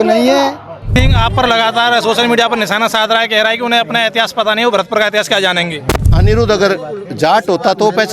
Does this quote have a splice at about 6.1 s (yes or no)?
yes